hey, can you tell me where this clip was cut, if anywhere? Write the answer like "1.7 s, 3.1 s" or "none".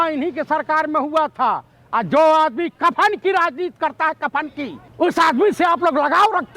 4.8 s